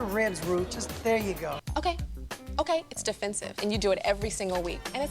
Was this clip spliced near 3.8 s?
no; 1 cut; at 1.6 s

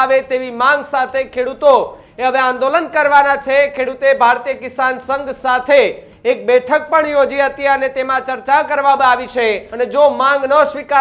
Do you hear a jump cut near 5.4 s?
no; 1 cut; at 9.7 s

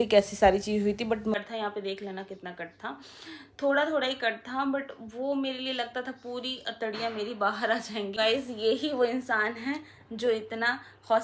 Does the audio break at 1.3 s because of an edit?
yes; 2 cuts; at 1.3 s, 8.2 s

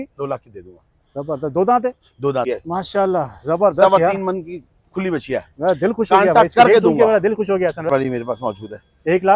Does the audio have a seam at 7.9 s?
yes; 2 cuts; at 2.5 s, 7.9 s

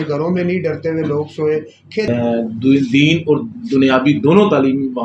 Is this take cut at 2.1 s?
yes; 1 cut; at 2.1 s

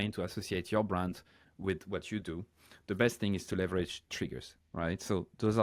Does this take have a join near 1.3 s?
no; 0 cuts

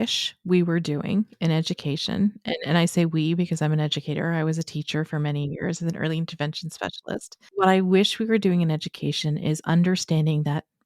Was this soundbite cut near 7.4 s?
yes; 1 cut; at 7.4 s

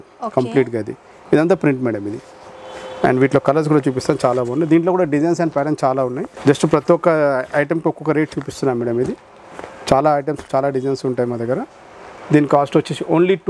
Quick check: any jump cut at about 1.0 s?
no; 0 cuts

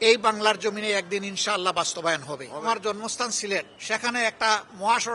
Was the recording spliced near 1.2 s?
no; 2 cuts; at 2.6 s, 3.8 s

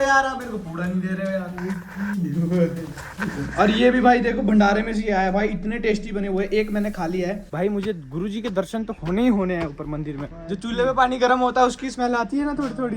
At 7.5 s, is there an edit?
yes; 2 cuts; at 7.5 s, 10.2 s

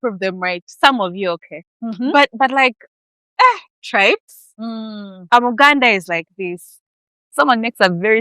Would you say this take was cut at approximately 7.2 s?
yes; 1 cut; at 7.2 s

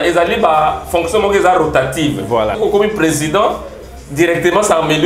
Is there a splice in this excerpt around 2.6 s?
yes; 1 cut; at 2.6 s

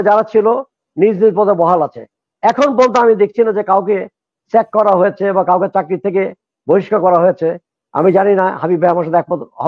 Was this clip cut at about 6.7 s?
no; 0 cuts

